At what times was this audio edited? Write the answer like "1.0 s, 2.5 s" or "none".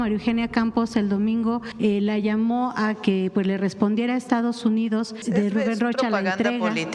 1.7 s, 5.2 s